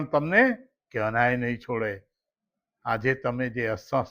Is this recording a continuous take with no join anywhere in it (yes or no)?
yes